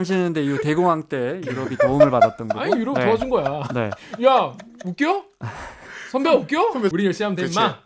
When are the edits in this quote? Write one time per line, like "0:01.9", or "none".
0:06.9